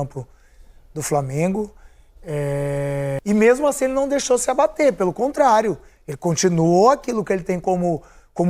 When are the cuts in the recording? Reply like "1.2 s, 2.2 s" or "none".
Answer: 3.2 s